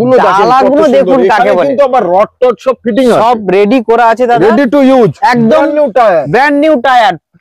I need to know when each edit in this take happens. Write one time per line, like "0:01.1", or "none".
none